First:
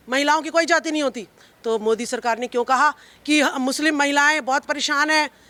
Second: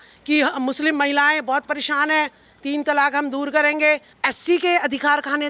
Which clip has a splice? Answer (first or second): second